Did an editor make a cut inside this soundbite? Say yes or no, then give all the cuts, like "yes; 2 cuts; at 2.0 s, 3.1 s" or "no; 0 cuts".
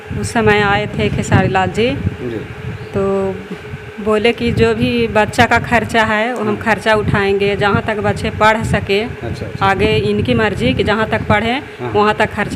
no; 0 cuts